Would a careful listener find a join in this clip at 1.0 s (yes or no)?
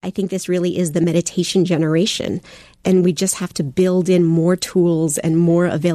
yes